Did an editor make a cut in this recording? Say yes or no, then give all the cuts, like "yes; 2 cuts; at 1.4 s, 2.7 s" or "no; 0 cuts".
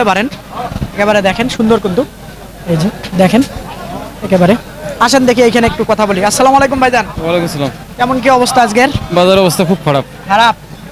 no; 0 cuts